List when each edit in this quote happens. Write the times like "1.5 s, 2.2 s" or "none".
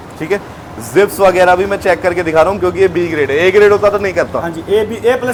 none